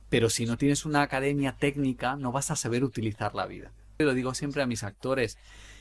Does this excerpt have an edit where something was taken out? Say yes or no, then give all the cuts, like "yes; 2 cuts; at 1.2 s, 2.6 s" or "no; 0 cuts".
yes; 1 cut; at 4.0 s